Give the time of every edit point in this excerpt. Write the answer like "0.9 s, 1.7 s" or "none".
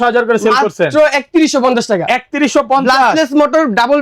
none